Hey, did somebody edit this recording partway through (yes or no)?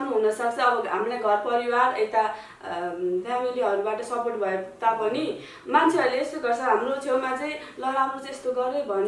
no